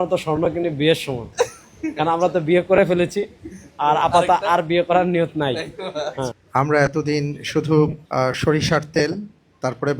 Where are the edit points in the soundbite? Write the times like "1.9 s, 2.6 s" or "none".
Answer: 6.4 s, 8.0 s